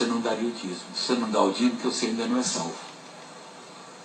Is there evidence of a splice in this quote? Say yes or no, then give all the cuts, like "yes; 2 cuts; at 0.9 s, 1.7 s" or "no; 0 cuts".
no; 0 cuts